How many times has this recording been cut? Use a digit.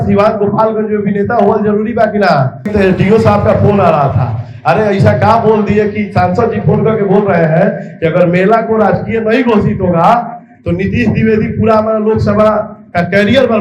1